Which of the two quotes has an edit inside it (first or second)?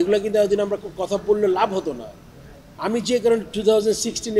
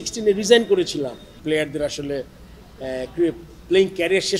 second